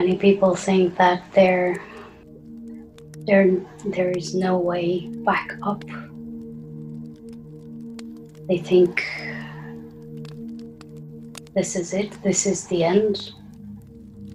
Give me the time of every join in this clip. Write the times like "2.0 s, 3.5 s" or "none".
2.0 s, 3.3 s, 5.8 s, 8.4 s